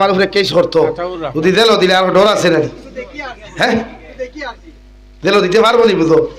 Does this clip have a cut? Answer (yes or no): no